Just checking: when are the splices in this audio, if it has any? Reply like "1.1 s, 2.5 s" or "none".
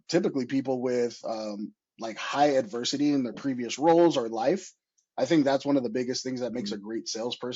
none